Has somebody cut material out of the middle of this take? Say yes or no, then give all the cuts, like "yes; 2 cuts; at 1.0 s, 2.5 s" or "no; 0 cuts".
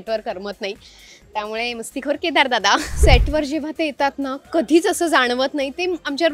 yes; 1 cut; at 3.0 s